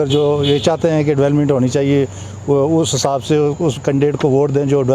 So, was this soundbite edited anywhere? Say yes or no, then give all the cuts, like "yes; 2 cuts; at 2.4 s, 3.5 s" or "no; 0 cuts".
no; 0 cuts